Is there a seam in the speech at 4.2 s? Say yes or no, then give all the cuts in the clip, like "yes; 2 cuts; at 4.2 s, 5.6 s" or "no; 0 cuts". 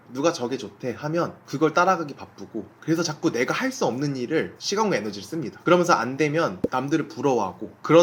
no; 1 cut; at 2.7 s